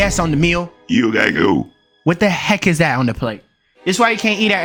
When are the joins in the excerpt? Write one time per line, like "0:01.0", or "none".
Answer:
none